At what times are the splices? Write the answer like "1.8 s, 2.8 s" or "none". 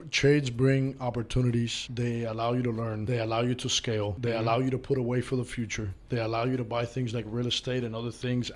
1.8 s, 3.0 s, 4.2 s